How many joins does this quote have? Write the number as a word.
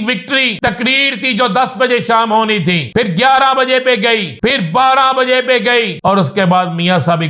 four